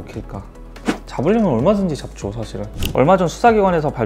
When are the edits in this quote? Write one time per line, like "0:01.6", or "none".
0:00.8
0:02.8